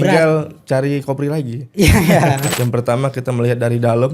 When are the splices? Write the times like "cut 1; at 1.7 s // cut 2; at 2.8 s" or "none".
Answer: cut 1; at 2.5 s